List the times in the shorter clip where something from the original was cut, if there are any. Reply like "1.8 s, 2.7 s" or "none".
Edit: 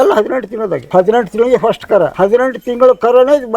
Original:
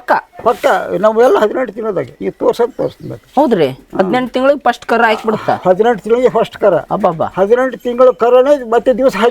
0.9 s, 2.1 s

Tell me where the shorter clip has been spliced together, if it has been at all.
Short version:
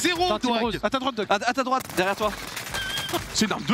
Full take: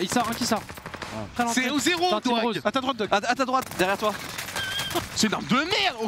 none

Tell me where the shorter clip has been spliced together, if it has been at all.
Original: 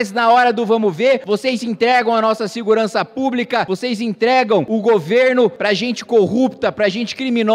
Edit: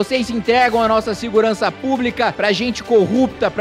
2.3 s

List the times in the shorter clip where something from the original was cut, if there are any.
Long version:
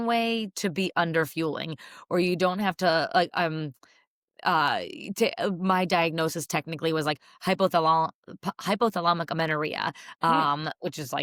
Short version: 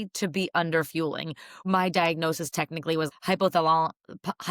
1.6 s, 3.1 s

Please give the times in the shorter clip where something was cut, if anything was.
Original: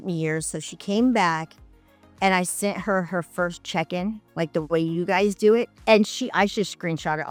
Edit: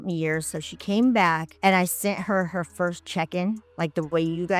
1.5 s

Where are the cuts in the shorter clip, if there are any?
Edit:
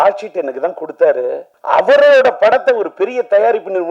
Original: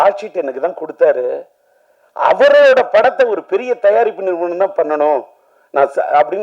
1.5 s

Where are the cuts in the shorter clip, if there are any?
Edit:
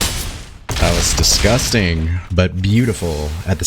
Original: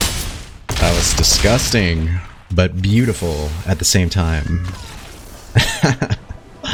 2.2 s

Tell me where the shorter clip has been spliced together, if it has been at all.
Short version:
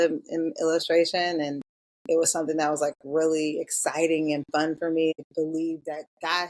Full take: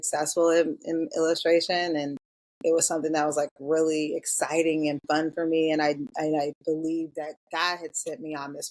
5.1 s

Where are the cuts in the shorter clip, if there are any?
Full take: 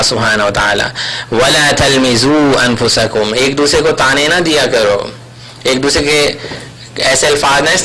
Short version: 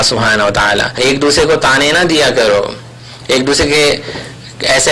1.0 s

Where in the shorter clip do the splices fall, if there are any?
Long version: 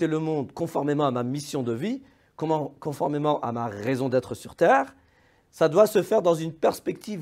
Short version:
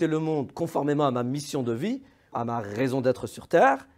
2.3 s

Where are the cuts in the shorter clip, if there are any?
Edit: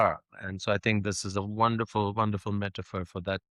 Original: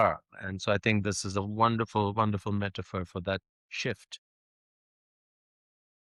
none

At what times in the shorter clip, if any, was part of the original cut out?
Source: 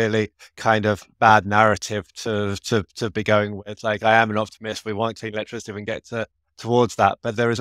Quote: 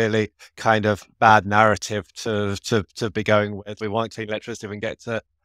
3.7 s

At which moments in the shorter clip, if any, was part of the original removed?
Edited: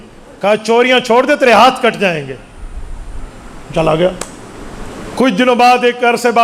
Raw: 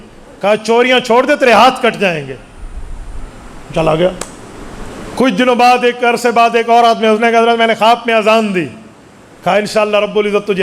none

